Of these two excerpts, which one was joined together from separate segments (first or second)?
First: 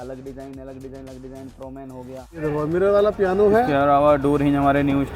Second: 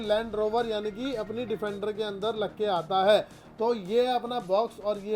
first